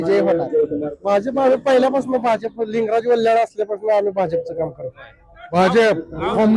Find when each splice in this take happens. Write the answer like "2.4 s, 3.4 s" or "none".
0.9 s, 5.6 s